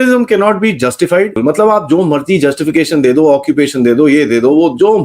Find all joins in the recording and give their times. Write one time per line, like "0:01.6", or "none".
0:01.3